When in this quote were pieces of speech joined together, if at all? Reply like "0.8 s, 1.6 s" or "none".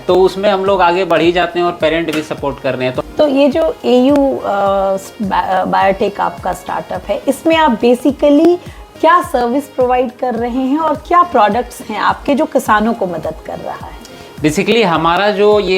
3.0 s